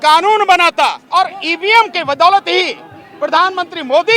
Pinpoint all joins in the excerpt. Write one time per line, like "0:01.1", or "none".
0:01.0

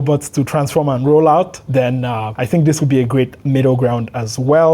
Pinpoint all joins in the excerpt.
0:02.4

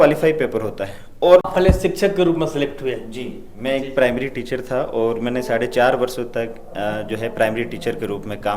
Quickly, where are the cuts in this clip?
0:01.5

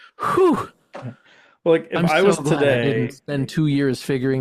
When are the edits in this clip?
none

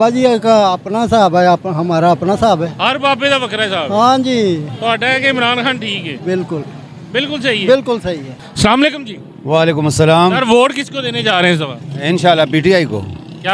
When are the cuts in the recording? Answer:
none

